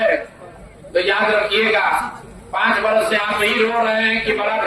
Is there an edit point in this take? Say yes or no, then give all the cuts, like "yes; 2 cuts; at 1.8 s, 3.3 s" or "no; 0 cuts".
no; 0 cuts